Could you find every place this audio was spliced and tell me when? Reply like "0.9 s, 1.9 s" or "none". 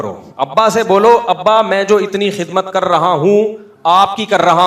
none